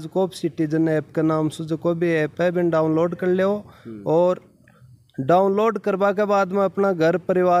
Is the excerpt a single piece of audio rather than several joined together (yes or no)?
yes